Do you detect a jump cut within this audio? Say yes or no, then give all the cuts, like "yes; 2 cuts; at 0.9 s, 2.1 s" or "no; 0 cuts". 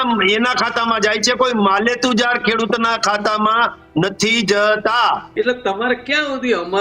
yes; 1 cut; at 5.3 s